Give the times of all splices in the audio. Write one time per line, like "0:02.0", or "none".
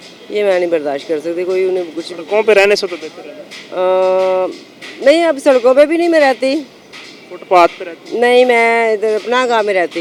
none